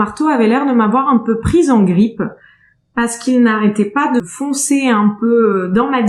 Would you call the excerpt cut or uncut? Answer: cut